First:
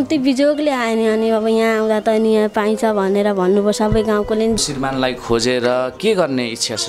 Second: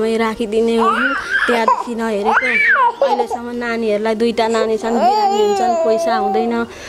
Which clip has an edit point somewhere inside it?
first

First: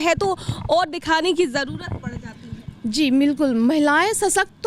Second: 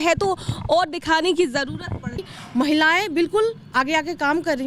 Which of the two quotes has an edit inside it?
second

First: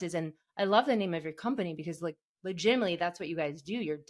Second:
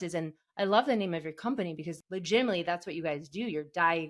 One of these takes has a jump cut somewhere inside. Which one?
second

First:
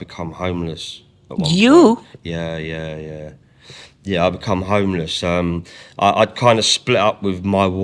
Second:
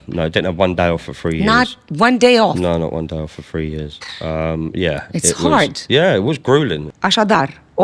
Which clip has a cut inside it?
second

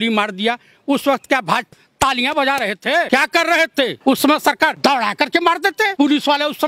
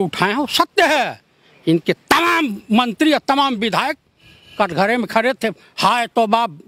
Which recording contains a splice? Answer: first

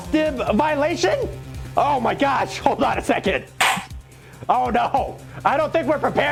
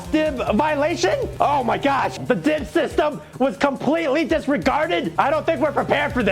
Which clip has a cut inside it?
second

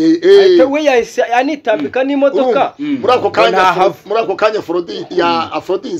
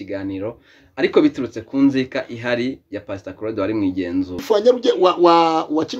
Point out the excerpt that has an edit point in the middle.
second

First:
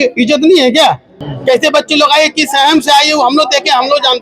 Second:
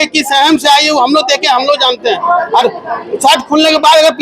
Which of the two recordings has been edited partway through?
first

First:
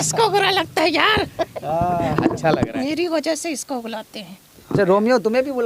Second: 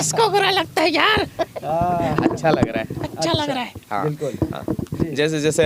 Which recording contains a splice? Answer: first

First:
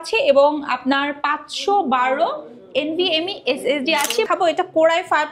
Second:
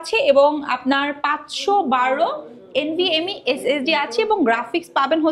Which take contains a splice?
first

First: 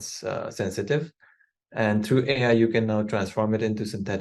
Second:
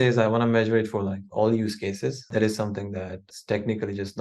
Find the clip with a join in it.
second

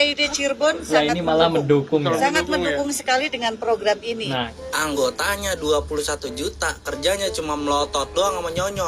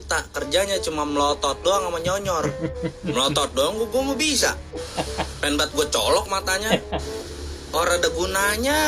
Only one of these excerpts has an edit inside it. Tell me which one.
first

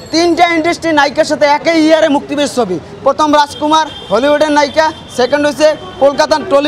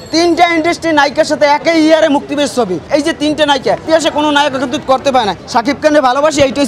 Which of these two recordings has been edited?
second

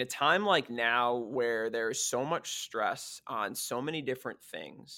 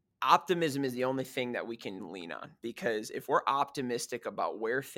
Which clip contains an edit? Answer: second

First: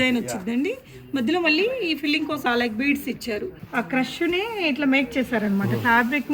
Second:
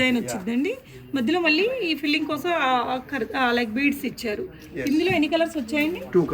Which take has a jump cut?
first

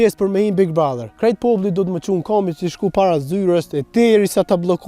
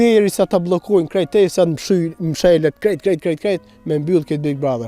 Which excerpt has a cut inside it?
first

